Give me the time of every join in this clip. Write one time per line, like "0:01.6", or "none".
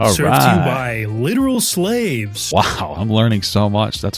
0:02.7